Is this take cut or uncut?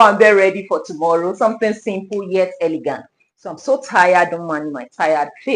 uncut